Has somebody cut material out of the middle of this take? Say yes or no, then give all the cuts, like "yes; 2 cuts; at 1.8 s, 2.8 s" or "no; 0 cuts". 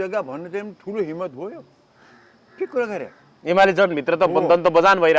no; 0 cuts